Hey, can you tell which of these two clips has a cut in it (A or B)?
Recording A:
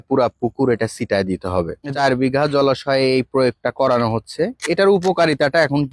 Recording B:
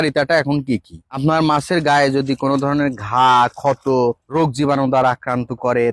A